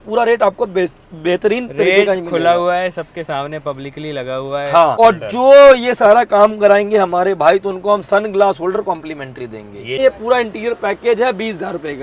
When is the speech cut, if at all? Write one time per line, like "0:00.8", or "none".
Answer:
0:05.0
0:10.0